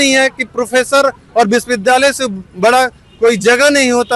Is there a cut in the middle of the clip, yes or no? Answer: no